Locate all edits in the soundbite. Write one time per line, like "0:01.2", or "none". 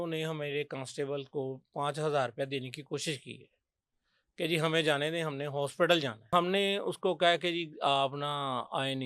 0:06.3